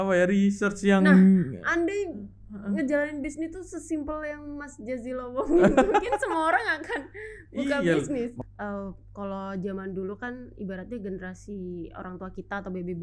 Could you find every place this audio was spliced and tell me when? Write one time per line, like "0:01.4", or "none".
0:08.4